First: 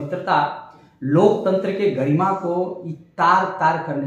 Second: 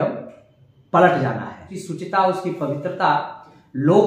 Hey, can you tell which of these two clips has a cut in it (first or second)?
second